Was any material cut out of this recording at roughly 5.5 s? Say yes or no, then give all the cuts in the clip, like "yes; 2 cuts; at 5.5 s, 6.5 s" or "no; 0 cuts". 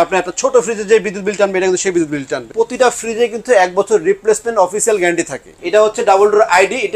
yes; 2 cuts; at 2.5 s, 5.5 s